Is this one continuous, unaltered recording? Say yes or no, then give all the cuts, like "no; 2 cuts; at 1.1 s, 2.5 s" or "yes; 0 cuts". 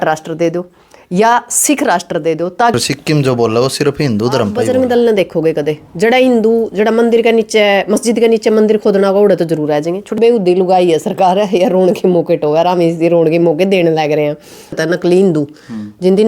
no; 4 cuts; at 2.7 s, 4.6 s, 10.2 s, 14.8 s